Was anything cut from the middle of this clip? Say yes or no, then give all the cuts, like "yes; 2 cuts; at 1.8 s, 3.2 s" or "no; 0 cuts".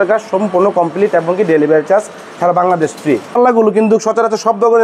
yes; 1 cut; at 3.4 s